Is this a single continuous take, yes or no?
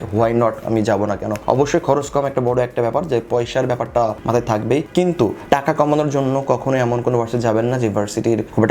no